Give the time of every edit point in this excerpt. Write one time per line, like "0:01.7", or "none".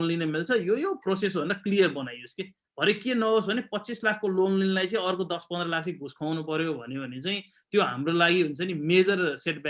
none